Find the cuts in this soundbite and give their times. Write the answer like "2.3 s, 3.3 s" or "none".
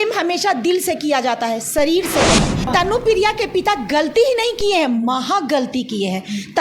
2.6 s

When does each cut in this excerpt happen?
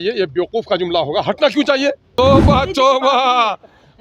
2.0 s

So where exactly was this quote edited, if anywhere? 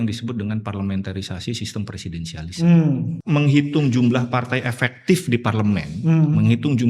3.1 s

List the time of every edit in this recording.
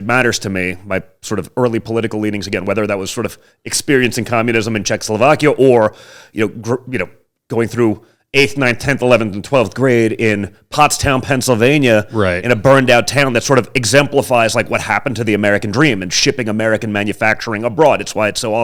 none

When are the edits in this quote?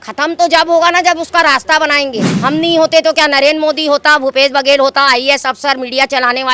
2.3 s

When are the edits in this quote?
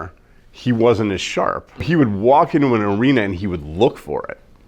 1.9 s

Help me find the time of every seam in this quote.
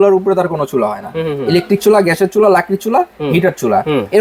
none

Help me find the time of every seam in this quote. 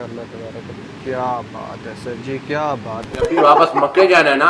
1.0 s, 3.1 s

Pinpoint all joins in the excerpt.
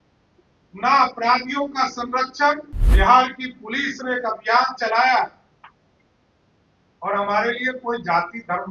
2.8 s

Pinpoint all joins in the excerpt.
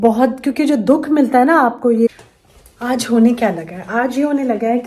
2.1 s

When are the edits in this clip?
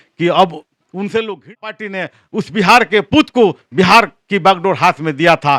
1.8 s

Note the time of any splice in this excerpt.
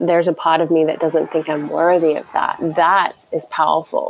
3.2 s

